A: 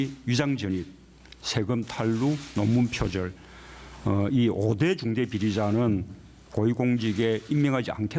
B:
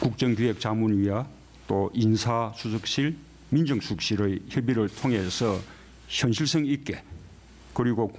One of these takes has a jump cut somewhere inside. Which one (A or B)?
B